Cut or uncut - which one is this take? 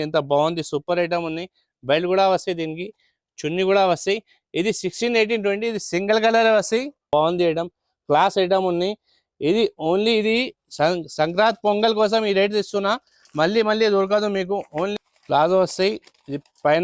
cut